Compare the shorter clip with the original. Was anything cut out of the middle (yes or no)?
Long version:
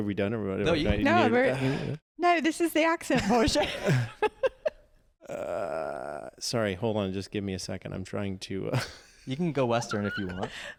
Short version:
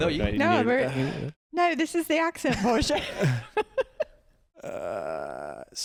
no